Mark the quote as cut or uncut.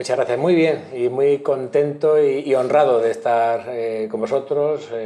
uncut